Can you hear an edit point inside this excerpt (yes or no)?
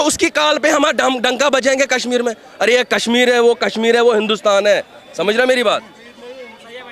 no